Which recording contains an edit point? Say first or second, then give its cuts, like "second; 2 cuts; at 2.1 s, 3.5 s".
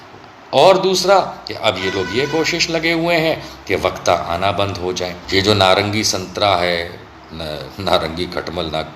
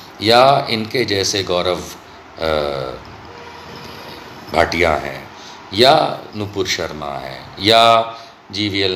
first; 1 cut; at 5.2 s